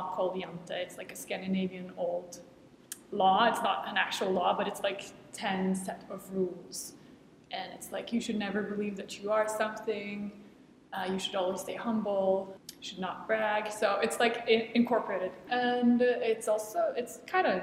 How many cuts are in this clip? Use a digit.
1